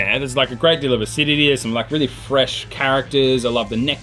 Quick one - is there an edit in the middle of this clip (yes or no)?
no